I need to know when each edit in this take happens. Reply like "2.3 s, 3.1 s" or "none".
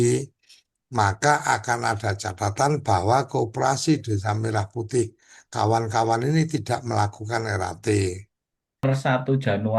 8.8 s